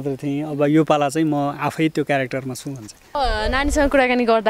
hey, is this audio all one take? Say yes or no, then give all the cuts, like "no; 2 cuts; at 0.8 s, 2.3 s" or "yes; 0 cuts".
no; 1 cut; at 3.1 s